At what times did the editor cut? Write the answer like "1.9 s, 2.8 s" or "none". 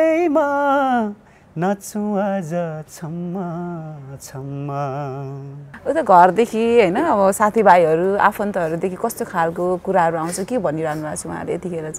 5.7 s